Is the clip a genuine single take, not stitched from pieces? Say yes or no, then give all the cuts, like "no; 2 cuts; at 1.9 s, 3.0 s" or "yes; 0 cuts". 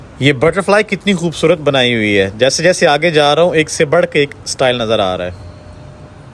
yes; 0 cuts